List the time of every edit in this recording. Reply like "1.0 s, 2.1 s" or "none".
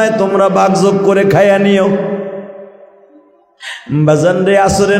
none